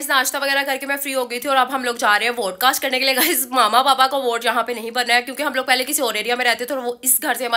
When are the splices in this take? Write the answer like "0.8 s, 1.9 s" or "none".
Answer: none